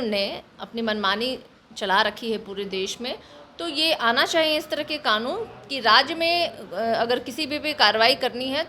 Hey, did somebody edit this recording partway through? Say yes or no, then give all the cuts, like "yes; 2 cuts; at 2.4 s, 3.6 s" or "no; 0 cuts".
no; 0 cuts